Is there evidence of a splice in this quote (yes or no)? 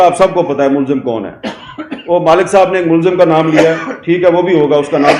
no